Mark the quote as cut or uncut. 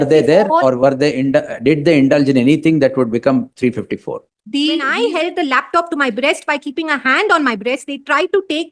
cut